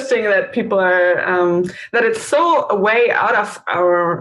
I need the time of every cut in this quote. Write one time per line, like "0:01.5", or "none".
none